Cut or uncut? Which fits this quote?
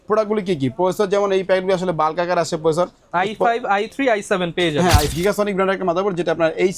cut